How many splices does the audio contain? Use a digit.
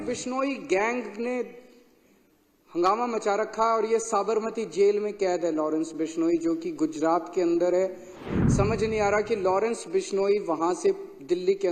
1